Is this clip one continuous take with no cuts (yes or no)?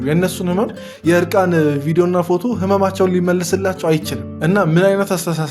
yes